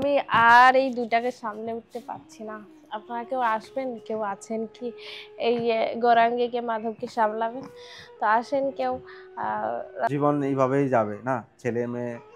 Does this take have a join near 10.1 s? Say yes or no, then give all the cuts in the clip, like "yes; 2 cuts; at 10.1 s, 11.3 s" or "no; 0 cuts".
yes; 1 cut; at 10.1 s